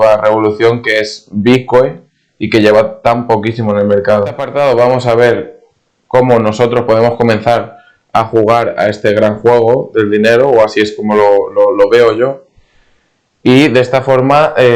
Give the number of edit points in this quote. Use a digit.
1